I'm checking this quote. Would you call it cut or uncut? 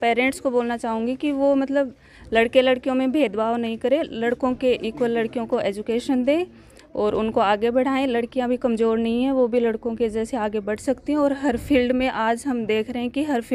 uncut